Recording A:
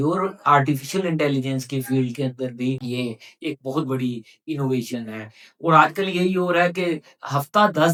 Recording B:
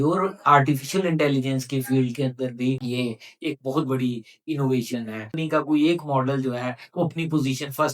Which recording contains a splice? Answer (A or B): B